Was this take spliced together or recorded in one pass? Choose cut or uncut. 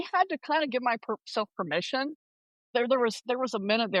cut